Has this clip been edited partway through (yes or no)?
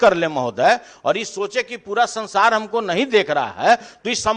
no